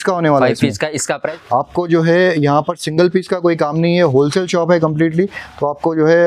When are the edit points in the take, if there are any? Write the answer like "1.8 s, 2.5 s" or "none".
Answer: 1.3 s

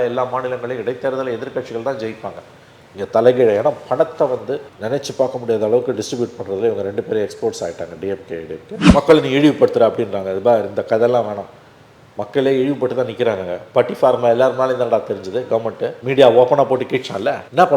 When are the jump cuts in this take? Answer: 8.7 s, 16.0 s

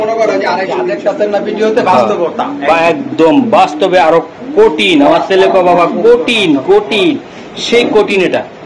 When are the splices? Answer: 1.0 s

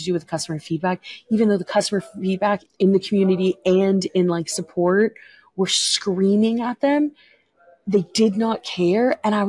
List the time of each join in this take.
2.6 s

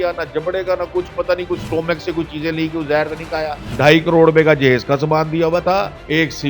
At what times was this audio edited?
3.8 s

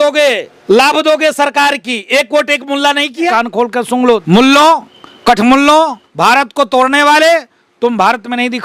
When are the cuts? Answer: none

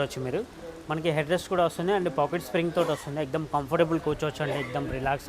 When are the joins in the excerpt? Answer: none

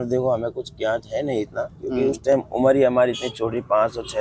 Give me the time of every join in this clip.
none

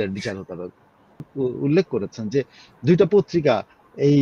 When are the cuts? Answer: 1.3 s

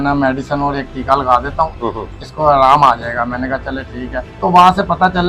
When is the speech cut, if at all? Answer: 4.2 s

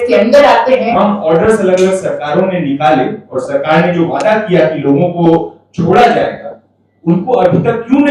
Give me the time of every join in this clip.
0.9 s

